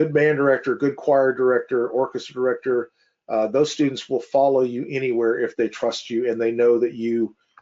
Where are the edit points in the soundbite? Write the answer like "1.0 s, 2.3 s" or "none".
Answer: none